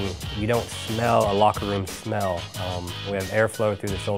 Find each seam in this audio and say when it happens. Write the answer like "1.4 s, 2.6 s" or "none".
1.6 s